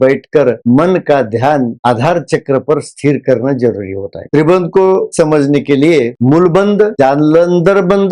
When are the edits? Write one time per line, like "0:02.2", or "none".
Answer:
0:04.2
0:05.1
0:06.1